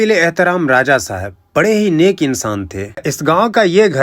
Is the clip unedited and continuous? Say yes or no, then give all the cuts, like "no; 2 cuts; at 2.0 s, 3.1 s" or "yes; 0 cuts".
no; 1 cut; at 3.1 s